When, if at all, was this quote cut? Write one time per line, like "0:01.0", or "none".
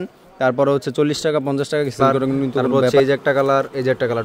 0:02.8

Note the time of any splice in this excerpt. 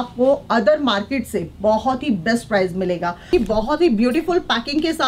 0:03.3

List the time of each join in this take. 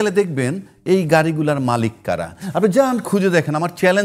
none

